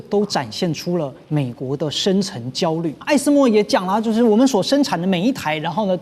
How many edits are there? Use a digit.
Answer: 1